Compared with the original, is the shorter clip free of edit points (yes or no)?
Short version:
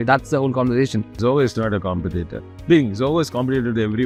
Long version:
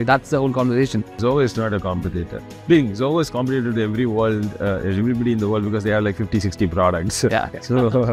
yes